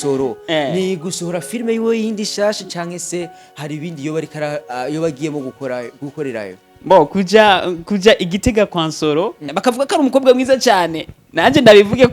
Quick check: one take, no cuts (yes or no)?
no